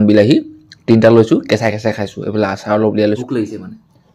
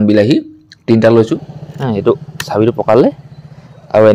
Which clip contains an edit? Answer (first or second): second